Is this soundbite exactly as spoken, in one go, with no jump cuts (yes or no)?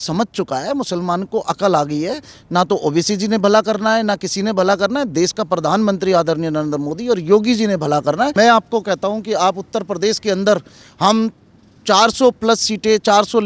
no